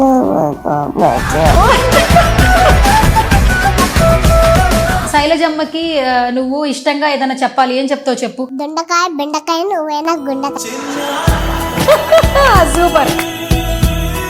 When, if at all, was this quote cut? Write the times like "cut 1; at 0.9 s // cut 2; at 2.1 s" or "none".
cut 1; at 5.1 s